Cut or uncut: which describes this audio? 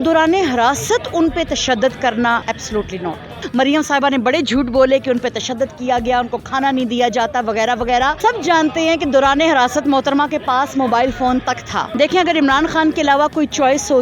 cut